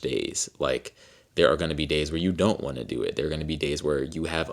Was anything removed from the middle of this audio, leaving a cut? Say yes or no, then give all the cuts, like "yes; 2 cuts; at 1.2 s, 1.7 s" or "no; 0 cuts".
no; 0 cuts